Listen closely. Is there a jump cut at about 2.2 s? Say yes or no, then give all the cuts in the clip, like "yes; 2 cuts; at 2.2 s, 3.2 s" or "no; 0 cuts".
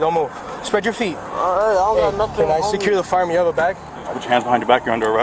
no; 1 cut; at 3.9 s